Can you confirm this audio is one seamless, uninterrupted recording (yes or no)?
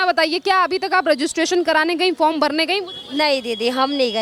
yes